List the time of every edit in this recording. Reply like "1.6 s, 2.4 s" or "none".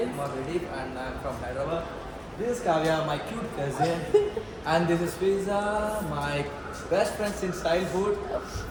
none